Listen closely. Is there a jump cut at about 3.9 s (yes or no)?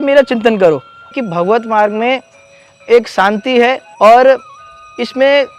yes